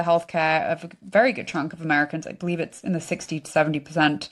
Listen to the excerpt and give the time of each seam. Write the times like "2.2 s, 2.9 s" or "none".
none